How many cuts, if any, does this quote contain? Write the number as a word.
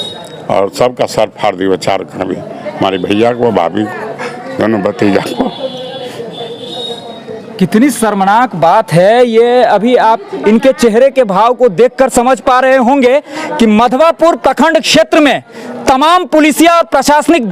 zero